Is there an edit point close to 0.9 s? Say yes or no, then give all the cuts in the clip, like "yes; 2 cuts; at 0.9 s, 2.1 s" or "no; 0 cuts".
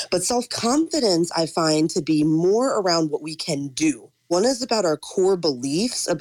no; 1 cut; at 4.3 s